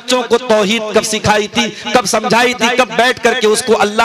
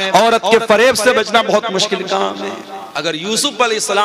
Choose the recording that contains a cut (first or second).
second